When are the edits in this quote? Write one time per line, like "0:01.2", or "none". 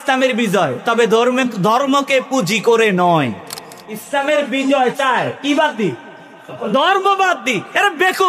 0:04.0